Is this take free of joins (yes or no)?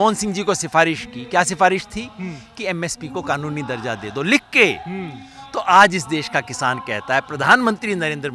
yes